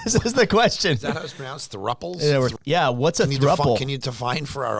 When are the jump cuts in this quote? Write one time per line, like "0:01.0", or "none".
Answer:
0:02.5